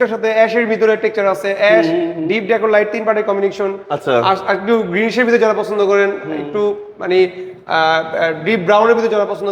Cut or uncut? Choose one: uncut